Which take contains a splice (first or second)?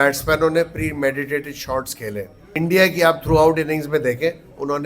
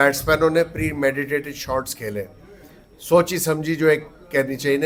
first